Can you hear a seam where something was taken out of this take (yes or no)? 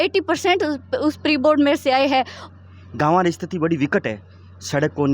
yes